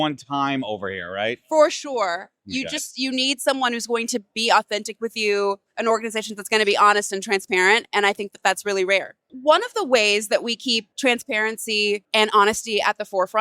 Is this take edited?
yes; 3 cuts; at 9.3 s, 10.9 s, 12.0 s

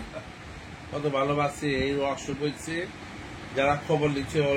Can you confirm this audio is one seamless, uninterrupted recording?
yes; 0 cuts

